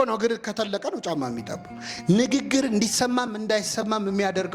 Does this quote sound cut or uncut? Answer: uncut